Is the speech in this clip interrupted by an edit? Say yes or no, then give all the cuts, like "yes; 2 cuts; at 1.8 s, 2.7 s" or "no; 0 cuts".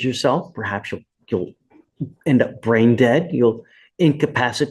no; 0 cuts